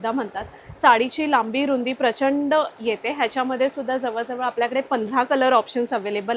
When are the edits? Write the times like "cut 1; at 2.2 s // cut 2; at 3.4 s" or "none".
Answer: none

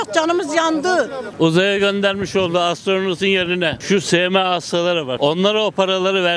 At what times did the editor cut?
cut 1; at 1.2 s // cut 2; at 3.8 s // cut 3; at 5.1 s

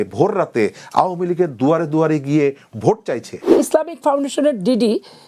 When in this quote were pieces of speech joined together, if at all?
cut 1; at 3.5 s

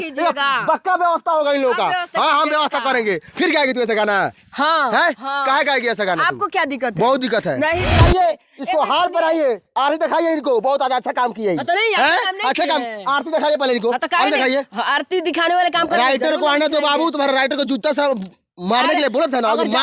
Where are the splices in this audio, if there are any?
cut 1; at 7.9 s

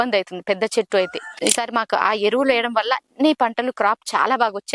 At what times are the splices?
cut 1; at 1.3 s

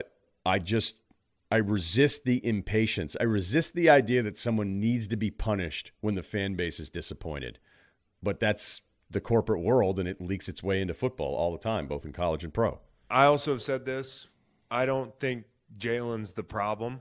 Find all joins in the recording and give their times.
cut 1; at 13.0 s

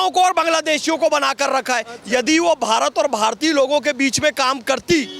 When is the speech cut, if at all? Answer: none

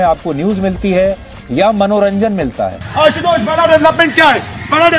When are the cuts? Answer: cut 1; at 2.8 s

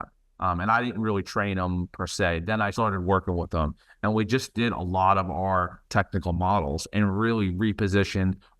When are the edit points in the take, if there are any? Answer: cut 1; at 2.7 s

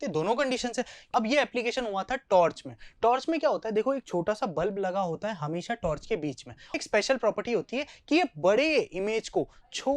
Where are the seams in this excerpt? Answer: cut 1; at 1.0 s // cut 2; at 6.8 s

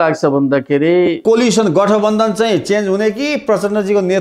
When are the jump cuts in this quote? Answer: cut 1; at 1.2 s

